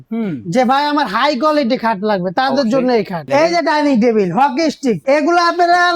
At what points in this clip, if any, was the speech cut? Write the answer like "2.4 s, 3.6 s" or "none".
3.2 s, 5.0 s